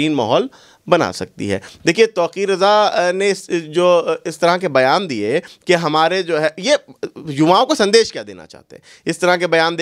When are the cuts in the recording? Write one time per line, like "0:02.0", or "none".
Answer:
none